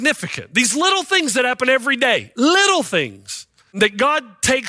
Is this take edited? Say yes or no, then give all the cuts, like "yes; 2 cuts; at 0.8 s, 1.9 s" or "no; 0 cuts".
yes; 1 cut; at 3.7 s